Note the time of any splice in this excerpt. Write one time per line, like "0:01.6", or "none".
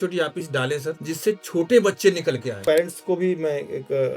0:01.0
0:02.6